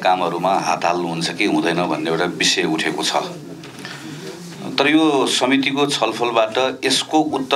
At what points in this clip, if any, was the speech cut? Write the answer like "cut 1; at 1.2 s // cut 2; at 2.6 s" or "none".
none

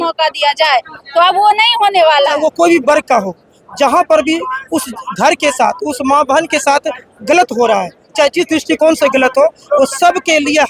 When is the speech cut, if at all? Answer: cut 1; at 2.4 s

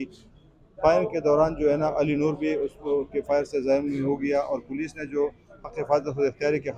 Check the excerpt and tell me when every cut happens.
none

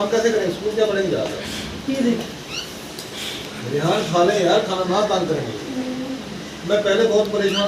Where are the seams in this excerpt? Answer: none

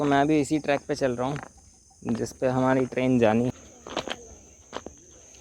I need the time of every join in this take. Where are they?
cut 1; at 3.5 s

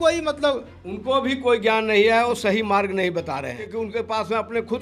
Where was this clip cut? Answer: cut 1; at 3.7 s

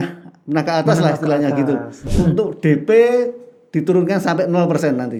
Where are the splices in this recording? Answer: cut 1; at 2.1 s

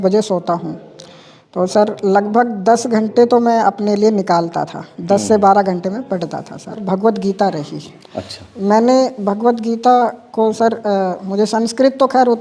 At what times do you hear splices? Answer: cut 1; at 6.8 s

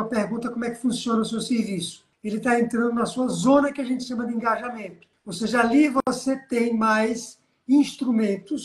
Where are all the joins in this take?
cut 1; at 2.2 s

